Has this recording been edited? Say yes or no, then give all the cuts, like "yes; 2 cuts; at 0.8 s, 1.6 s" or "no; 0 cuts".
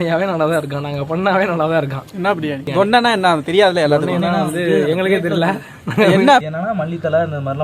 yes; 2 cuts; at 2.7 s, 6.5 s